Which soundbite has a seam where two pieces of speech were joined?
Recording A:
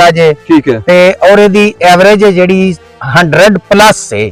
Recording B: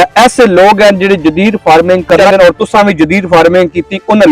B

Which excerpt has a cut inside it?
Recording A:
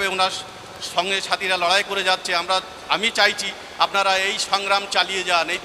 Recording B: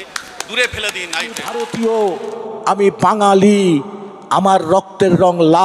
B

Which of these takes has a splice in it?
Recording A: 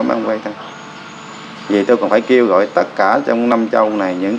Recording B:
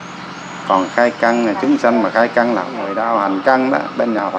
B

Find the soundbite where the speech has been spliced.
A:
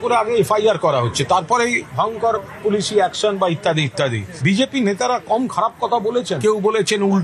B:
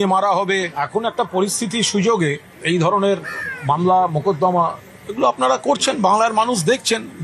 B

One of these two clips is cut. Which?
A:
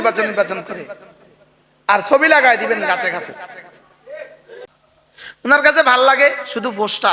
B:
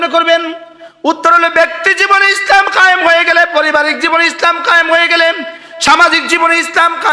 A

